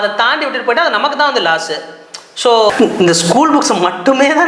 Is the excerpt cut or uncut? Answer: cut